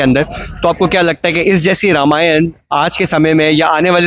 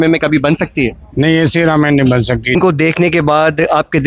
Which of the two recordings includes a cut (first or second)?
second